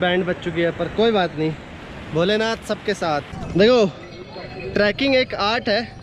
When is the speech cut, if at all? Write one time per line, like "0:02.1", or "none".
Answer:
0:03.3